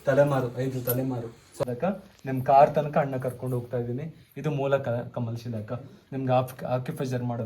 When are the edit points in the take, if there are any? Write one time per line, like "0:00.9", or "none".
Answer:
0:01.6